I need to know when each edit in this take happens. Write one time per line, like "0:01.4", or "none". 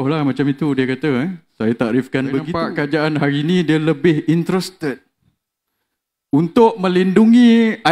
0:02.6